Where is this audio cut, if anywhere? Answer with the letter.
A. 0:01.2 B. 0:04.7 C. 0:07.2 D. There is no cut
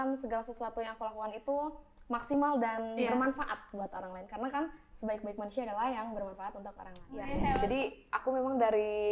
C